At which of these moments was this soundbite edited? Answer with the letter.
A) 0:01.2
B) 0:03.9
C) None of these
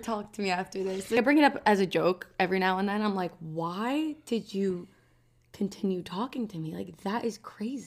A